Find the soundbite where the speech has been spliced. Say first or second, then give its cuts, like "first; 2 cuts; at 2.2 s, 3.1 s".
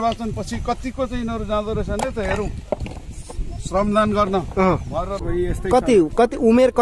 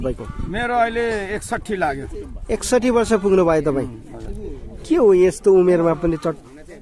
first; 1 cut; at 5.2 s